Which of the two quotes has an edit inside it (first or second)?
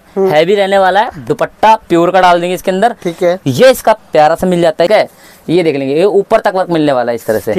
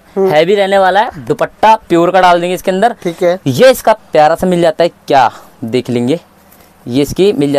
first